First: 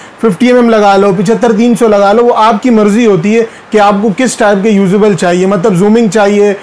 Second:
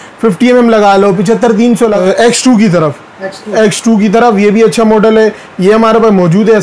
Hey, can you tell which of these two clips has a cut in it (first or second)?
second